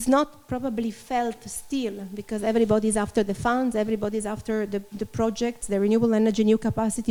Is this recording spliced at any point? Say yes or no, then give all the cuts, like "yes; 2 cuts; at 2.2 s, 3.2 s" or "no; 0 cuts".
no; 0 cuts